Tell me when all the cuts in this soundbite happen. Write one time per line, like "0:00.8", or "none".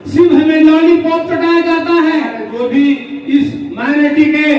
0:02.4